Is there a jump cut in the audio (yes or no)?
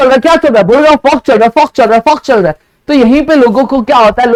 no